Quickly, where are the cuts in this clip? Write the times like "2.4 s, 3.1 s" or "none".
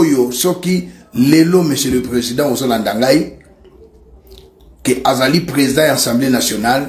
none